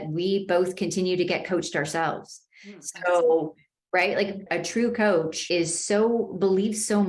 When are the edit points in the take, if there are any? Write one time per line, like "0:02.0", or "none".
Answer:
0:04.4
0:05.4

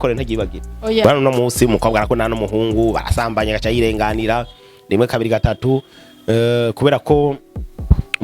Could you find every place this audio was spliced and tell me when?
0:01.0

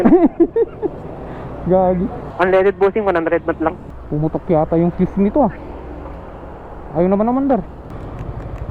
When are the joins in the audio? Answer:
0:02.3
0:03.9
0:07.9

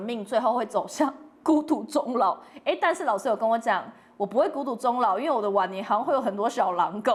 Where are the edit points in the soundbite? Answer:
none

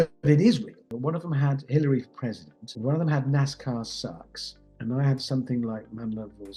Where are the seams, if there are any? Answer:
0:00.9
0:02.6
0:04.6

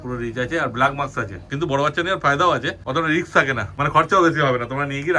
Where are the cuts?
0:01.4
0:02.8
0:03.7

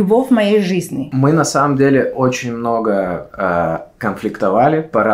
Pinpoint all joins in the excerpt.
0:01.0

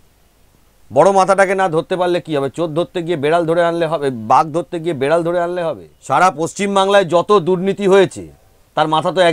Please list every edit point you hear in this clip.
0:05.9

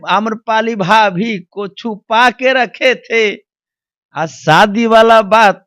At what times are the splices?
none

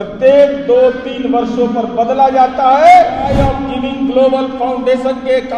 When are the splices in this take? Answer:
0:03.3

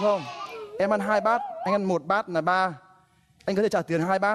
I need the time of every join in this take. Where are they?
none

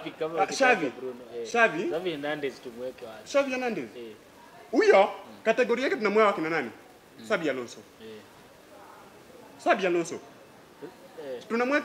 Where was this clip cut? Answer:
none

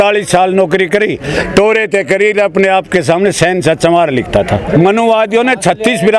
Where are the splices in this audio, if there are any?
0:04.7

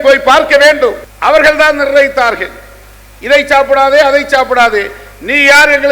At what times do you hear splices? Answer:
0:01.1

